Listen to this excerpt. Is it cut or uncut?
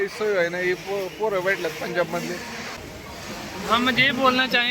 cut